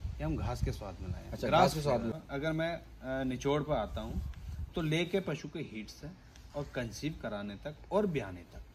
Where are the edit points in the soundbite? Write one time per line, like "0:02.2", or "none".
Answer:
0:02.2